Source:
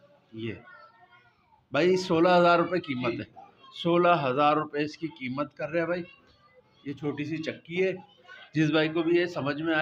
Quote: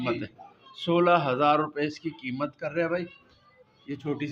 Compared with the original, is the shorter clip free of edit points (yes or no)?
yes